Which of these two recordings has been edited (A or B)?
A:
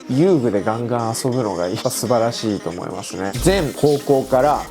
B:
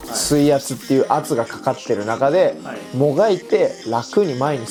A